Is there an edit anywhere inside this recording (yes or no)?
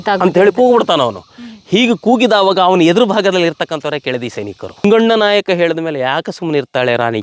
yes